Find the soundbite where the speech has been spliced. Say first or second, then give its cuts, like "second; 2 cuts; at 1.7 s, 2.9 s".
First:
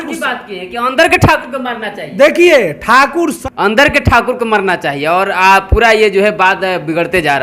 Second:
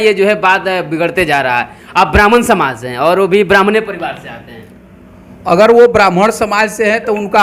first; 1 cut; at 3.4 s